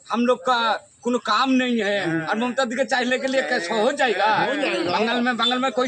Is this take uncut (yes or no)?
yes